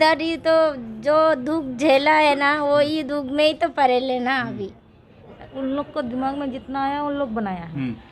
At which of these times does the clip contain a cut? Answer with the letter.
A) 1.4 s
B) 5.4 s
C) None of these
B